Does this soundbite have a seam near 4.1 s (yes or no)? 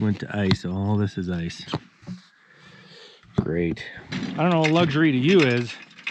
yes